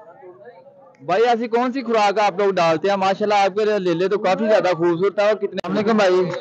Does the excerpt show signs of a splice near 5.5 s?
yes; 1 cut; at 5.5 s

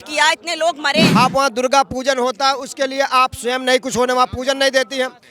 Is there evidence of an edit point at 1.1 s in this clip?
yes; 1 cut; at 1.1 s

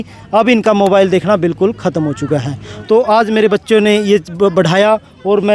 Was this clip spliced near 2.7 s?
yes; 1 cut; at 2.7 s

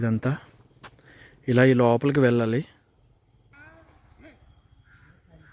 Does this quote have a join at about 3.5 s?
yes; 1 cut; at 3.5 s

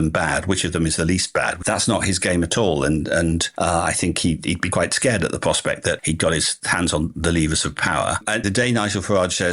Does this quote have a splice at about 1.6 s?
yes; 3 cuts; at 1.6 s, 4.6 s, 8.2 s

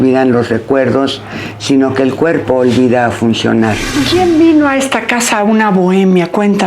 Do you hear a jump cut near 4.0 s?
yes; 1 cut; at 4.0 s

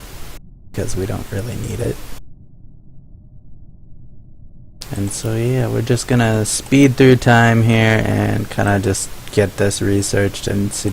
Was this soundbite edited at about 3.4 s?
yes; 1 cut; at 3.4 s

